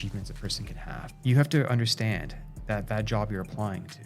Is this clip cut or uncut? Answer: cut